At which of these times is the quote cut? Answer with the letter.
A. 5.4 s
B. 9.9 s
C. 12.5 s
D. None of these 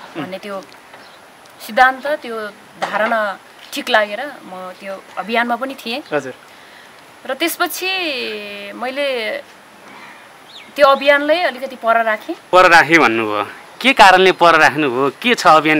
C